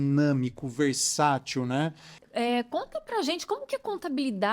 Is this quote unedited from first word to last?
no; 1 cut; at 2.1 s

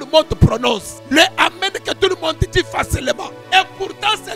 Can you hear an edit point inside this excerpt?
yes; 2 cuts; at 0.9 s, 3.3 s

